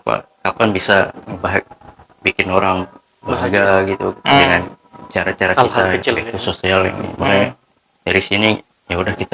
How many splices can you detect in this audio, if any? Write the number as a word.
zero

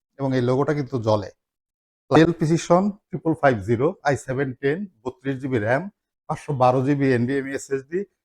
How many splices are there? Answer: one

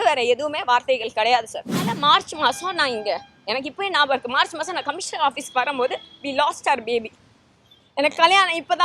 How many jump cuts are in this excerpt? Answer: one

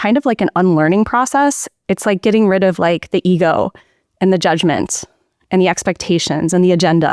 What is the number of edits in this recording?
one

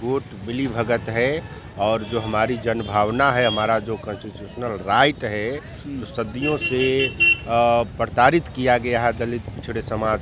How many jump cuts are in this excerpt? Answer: zero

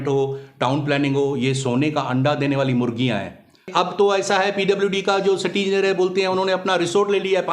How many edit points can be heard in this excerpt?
one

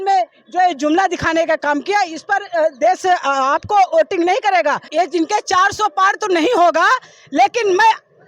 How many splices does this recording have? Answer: one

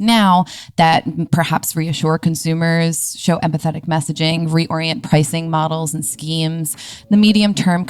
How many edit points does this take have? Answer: zero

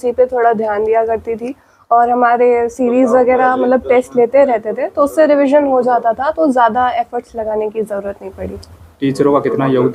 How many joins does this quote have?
zero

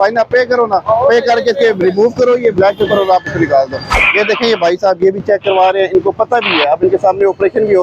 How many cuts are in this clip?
one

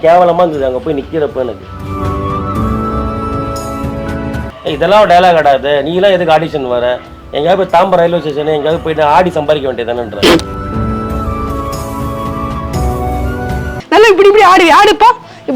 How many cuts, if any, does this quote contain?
two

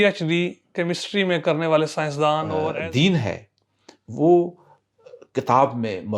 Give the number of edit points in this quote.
one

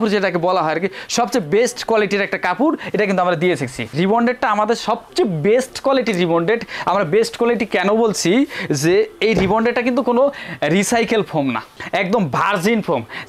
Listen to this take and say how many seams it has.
one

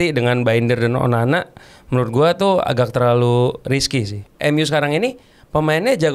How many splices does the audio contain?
one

